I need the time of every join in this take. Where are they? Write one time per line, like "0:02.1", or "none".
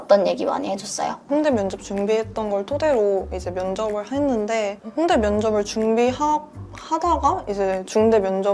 0:01.2